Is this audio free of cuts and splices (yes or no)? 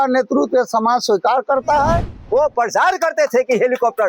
no